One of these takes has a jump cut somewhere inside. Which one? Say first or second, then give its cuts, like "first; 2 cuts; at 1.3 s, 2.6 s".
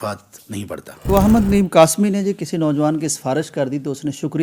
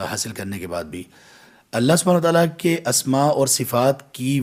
first; 1 cut; at 1.1 s